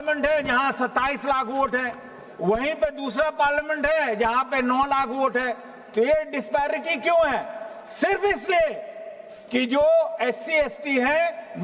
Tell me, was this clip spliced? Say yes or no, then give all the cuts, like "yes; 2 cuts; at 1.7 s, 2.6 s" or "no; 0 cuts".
no; 0 cuts